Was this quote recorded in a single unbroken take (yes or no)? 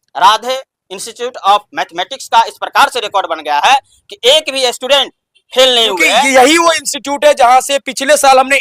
no